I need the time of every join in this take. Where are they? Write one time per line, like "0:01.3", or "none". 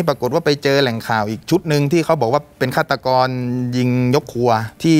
none